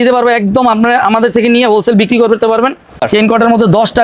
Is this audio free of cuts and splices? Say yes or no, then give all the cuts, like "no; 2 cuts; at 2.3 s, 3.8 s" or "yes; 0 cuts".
no; 1 cut; at 3.1 s